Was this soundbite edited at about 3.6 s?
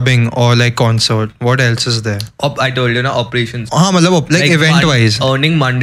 yes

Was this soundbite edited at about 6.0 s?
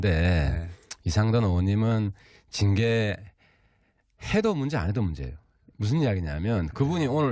yes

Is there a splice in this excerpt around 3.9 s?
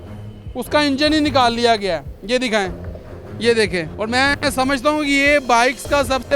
yes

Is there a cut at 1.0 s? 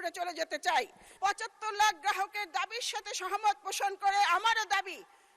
yes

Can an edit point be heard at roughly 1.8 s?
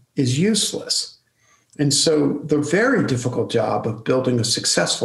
no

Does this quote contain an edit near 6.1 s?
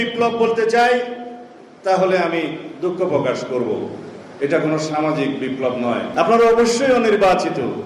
yes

